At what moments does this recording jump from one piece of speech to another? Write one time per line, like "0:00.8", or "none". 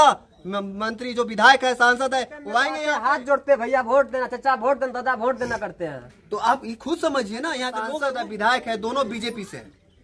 0:02.7
0:07.9